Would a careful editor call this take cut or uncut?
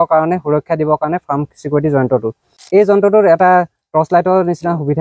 cut